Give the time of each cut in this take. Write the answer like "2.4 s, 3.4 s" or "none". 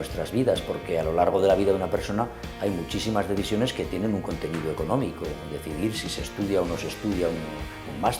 none